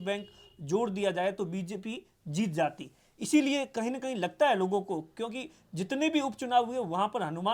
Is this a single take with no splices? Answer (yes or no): yes